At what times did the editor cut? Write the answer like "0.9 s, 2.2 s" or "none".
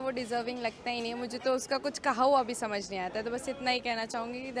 none